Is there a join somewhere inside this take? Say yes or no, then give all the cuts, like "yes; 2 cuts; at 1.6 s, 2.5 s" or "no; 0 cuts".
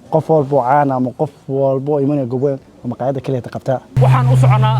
yes; 1 cut; at 3.9 s